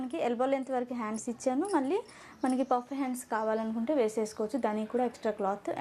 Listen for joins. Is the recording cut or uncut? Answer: uncut